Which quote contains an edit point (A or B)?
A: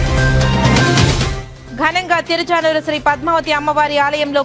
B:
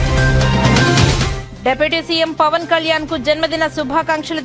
B